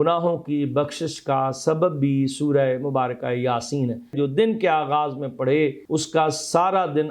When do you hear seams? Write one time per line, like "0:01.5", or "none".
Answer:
0:04.1
0:05.8